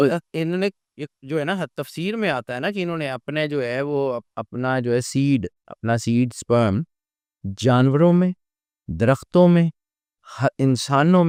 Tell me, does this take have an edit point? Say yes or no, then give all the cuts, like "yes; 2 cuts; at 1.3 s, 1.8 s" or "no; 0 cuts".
no; 0 cuts